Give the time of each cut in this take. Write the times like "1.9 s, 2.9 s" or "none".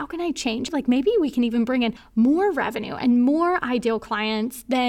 0.7 s, 2.0 s